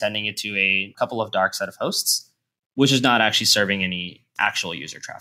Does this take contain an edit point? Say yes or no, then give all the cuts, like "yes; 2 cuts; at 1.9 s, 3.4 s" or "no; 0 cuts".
yes; 1 cut; at 0.9 s